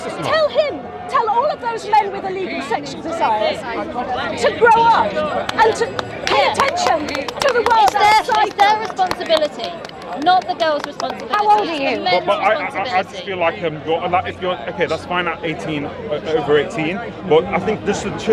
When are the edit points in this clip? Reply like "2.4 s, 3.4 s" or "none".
none

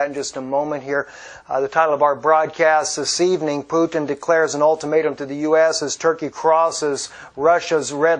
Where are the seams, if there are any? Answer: 1.2 s

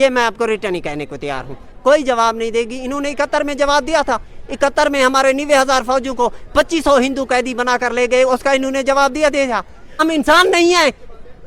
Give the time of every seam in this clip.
10.0 s

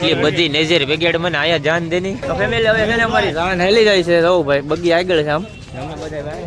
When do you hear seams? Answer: 2.2 s

